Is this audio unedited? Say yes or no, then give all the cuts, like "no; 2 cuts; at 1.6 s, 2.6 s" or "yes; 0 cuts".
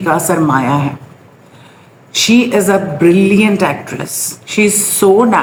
yes; 0 cuts